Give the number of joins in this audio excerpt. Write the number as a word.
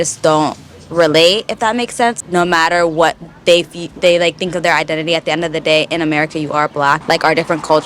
two